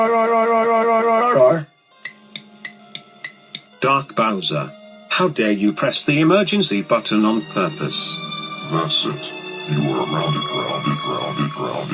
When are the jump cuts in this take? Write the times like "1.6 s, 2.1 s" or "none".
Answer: 1.2 s, 1.9 s